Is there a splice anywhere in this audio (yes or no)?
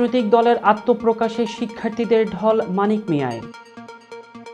no